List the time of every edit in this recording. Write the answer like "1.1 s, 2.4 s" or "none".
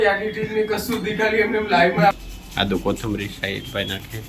2.2 s